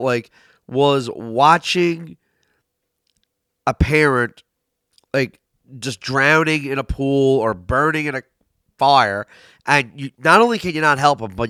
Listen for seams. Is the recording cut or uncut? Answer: uncut